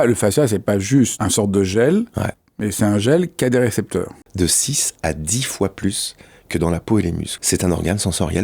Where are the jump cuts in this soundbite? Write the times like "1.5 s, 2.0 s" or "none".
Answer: 1.1 s, 4.2 s, 7.3 s